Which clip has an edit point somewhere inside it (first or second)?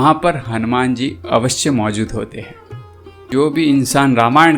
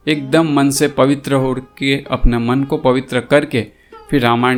first